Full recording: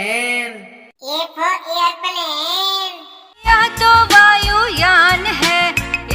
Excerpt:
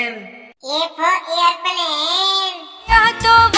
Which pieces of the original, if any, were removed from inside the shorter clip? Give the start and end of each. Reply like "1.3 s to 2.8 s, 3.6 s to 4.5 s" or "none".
3.1 s to 3.2 s